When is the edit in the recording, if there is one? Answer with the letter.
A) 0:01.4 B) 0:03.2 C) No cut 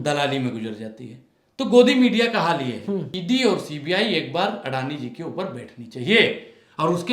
B